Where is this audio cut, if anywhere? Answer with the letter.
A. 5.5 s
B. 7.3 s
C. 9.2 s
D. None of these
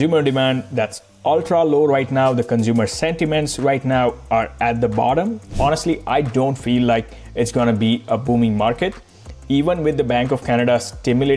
A